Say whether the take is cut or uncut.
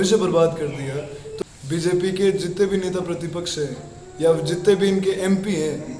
cut